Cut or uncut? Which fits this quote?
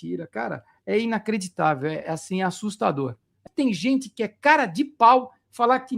cut